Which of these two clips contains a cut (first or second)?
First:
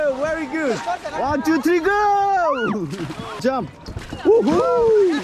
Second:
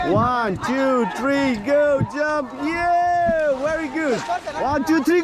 first